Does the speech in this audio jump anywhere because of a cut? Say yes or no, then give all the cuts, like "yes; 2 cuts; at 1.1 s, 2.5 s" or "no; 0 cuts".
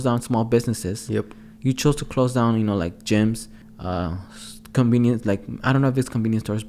no; 0 cuts